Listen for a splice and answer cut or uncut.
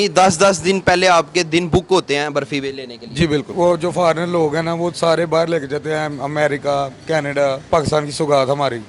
cut